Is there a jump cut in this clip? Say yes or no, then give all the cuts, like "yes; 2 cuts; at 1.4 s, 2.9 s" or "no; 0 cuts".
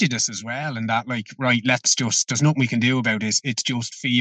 no; 0 cuts